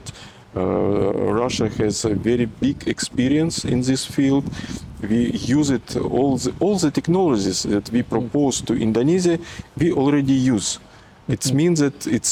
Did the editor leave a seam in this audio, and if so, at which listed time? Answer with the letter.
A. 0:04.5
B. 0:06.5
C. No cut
C